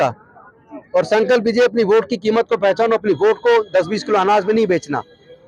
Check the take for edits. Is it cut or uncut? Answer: uncut